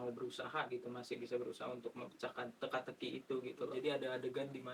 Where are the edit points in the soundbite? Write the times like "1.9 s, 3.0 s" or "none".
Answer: 3.7 s